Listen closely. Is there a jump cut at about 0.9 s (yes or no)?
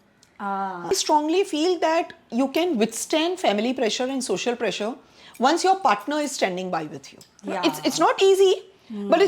yes